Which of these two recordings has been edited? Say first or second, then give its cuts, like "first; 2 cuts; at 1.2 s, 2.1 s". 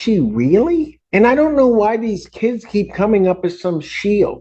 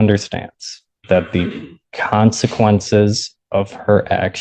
first; 1 cut; at 1.0 s